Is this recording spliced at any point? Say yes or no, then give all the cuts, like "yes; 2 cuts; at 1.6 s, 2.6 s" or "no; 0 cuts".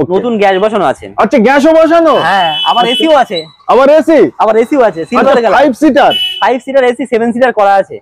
no; 0 cuts